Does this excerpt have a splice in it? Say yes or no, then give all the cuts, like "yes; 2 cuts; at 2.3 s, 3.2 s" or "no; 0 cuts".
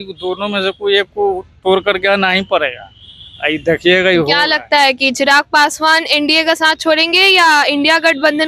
no; 0 cuts